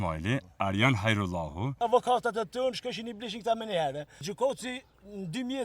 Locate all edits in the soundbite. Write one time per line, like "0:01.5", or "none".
0:01.8
0:04.2